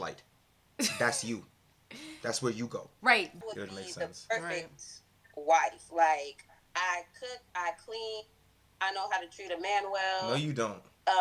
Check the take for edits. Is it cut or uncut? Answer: cut